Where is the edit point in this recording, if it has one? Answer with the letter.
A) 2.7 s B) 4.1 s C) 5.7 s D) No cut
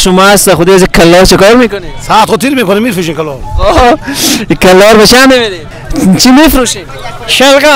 C